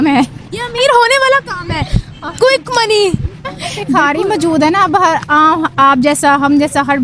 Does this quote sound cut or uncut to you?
cut